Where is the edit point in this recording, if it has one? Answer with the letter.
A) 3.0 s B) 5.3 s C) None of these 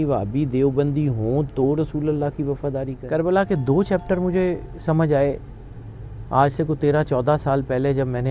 A